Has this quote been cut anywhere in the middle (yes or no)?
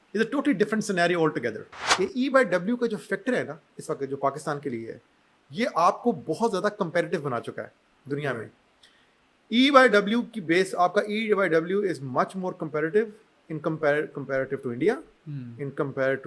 yes